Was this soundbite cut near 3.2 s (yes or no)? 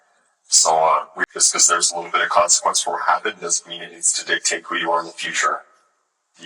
no